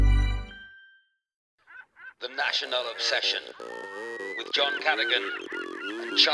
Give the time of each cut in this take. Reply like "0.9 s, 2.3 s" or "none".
1.5 s

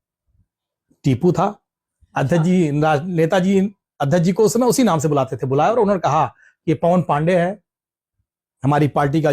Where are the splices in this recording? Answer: none

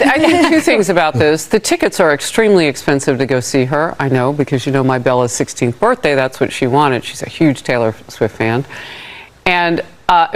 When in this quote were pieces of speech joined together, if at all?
none

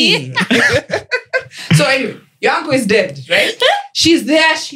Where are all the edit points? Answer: none

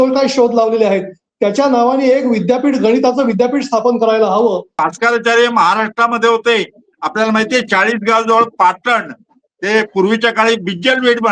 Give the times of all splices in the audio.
4.8 s

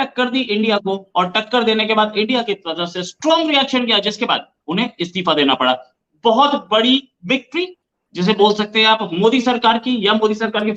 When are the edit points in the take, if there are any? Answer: none

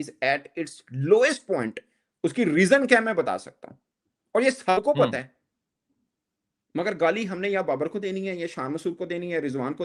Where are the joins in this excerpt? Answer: none

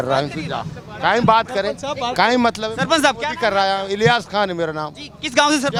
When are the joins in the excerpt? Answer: none

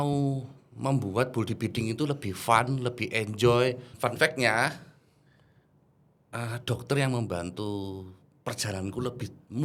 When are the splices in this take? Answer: 3.9 s

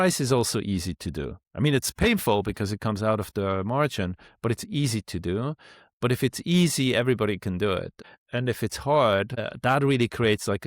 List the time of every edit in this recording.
8.0 s, 9.4 s

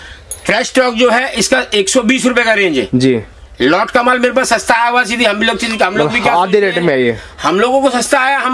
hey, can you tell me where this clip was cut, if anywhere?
none

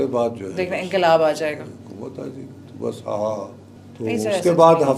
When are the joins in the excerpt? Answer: none

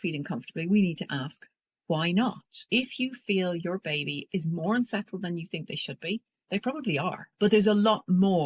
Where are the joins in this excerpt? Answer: 2.5 s, 6.3 s, 7.2 s

